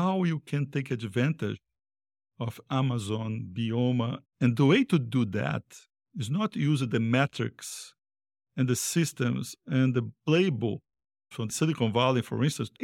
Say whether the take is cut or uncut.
uncut